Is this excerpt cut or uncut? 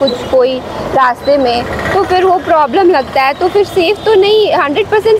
uncut